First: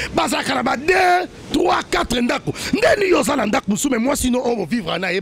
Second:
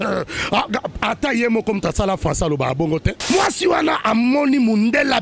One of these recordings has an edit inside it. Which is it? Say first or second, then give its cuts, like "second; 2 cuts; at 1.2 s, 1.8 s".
second; 1 cut; at 3.3 s